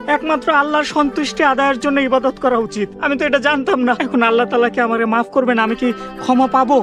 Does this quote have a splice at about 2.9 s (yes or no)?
yes